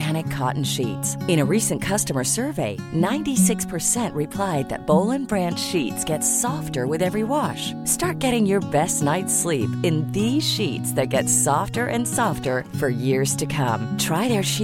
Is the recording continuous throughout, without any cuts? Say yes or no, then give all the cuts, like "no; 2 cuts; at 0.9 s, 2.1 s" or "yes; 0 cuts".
yes; 0 cuts